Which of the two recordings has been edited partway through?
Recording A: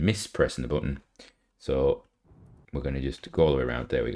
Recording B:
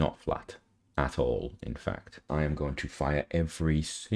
B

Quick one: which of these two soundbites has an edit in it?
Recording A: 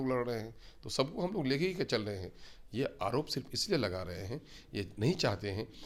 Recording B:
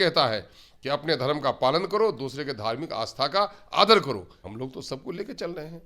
B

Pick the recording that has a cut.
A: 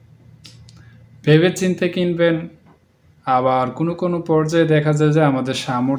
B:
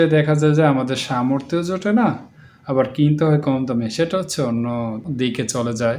B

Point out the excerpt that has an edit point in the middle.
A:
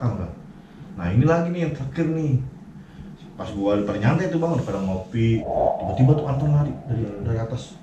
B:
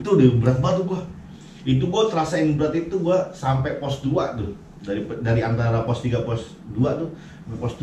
A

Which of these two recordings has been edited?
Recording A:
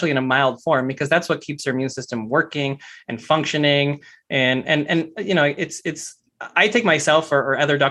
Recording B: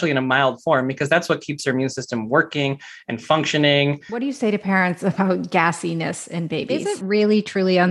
B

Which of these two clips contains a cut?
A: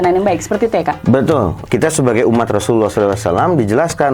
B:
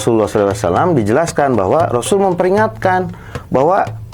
A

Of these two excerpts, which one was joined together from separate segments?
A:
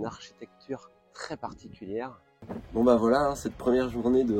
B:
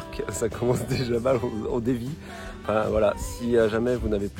A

